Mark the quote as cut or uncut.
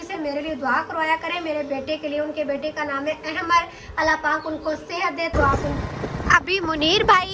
cut